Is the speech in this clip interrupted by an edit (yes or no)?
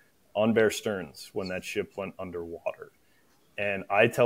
no